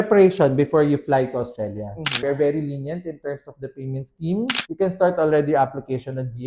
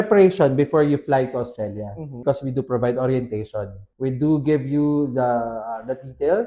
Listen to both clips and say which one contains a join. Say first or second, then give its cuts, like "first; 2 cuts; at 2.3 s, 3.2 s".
first; 2 cuts; at 2.1 s, 4.6 s